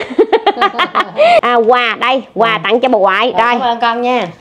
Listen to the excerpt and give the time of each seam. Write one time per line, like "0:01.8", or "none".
0:01.4